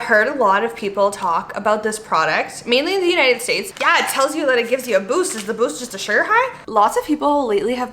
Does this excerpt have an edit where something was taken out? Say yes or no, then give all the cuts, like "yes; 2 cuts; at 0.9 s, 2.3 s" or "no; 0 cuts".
yes; 2 cuts; at 3.7 s, 6.6 s